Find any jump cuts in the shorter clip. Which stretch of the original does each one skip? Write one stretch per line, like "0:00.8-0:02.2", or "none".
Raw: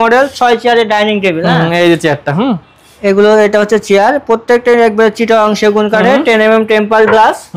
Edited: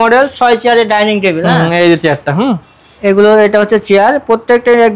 none